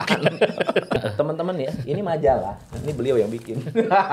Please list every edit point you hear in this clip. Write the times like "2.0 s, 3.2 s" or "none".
1.0 s